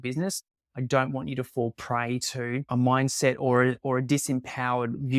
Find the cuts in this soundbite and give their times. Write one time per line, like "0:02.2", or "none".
0:02.7